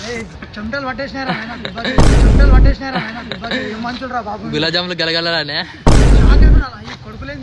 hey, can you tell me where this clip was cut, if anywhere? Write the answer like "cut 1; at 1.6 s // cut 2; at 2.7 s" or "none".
none